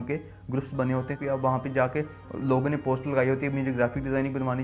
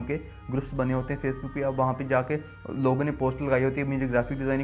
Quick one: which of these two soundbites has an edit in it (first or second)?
first